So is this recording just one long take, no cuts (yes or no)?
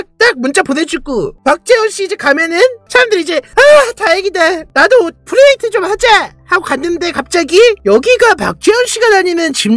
no